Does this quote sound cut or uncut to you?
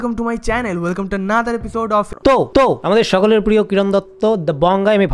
cut